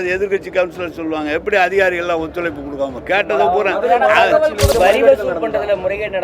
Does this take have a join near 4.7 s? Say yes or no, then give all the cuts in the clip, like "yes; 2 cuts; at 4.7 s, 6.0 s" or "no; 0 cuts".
yes; 1 cut; at 4.7 s